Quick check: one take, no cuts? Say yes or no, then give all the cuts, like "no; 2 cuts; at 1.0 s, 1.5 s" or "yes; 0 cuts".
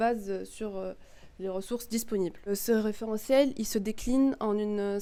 yes; 0 cuts